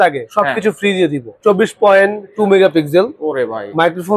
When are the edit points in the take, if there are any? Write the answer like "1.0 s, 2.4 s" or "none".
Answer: 1.3 s